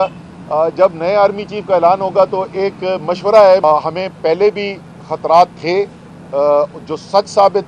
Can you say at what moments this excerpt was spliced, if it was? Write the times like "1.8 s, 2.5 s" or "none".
3.6 s